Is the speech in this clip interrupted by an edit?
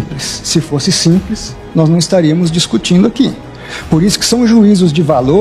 no; 0 cuts

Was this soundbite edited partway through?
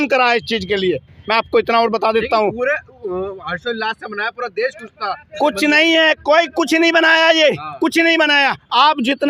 no; 0 cuts

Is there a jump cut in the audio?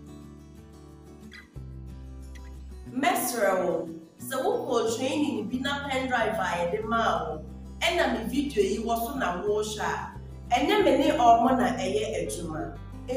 yes; 1 cut; at 2.9 s

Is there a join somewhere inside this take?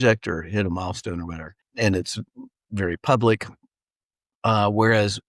yes; 1 cut; at 1.6 s

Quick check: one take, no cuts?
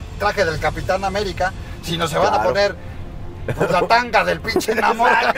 yes; 0 cuts

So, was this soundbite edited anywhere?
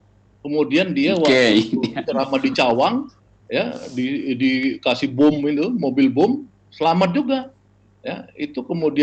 no; 0 cuts

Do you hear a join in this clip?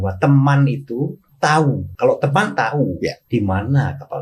yes; 3 cuts; at 1.2 s, 1.9 s, 3.2 s

